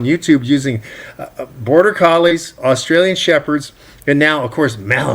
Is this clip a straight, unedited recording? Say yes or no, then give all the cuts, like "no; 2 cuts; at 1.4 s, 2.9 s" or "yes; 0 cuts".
yes; 0 cuts